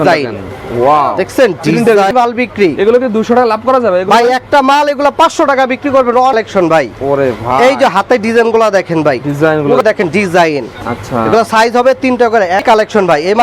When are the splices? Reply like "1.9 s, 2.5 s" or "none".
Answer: 2.1 s, 6.3 s, 9.8 s, 12.6 s